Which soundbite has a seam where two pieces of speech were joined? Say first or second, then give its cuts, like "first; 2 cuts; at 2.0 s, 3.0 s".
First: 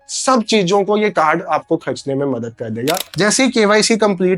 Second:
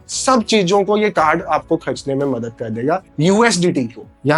first; 1 cut; at 3.1 s